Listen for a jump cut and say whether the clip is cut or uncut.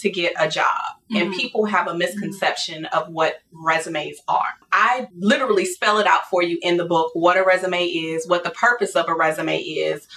cut